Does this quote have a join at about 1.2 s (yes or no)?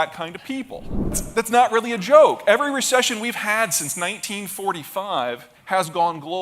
yes